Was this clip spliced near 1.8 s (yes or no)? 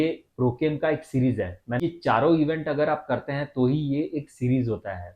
yes